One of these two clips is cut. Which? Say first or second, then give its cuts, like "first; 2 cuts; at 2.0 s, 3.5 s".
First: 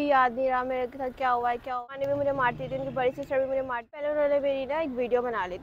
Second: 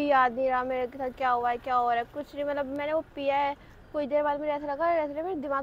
first; 2 cuts; at 1.9 s, 4.1 s